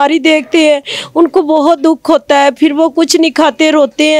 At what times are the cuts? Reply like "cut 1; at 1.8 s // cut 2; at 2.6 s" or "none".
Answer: none